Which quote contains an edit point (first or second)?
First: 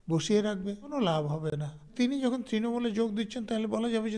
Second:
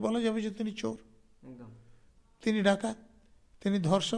first